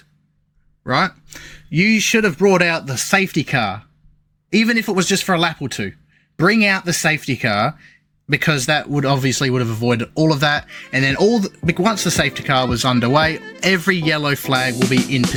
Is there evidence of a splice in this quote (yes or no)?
no